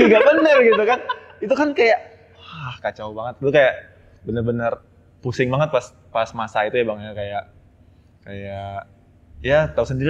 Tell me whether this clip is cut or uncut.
uncut